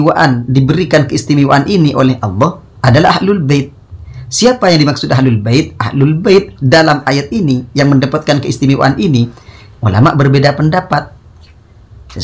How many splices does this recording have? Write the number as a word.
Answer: zero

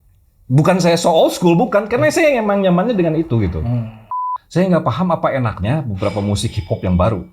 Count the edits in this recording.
one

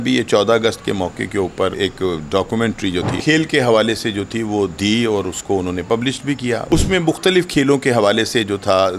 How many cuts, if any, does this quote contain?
three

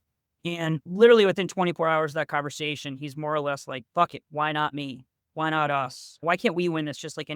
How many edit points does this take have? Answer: two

